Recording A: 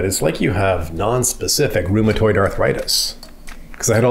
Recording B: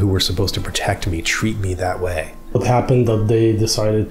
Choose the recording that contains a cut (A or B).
B